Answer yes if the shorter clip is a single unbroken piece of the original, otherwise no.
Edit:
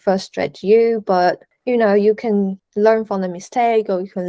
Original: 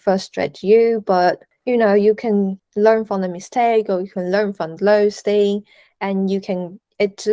yes